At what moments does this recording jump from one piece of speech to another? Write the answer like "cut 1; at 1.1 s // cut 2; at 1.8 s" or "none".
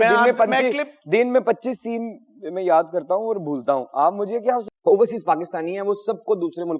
cut 1; at 4.7 s